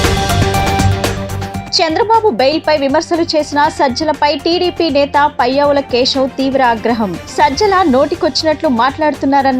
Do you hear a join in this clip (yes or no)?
no